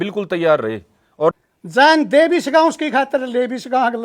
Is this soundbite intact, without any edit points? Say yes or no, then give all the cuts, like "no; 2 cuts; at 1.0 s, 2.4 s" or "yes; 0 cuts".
no; 1 cut; at 1.3 s